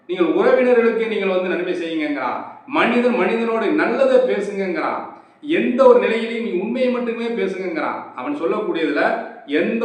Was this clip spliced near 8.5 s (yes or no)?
no